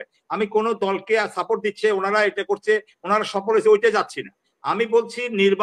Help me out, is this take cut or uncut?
uncut